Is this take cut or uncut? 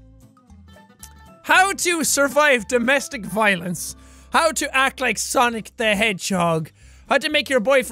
uncut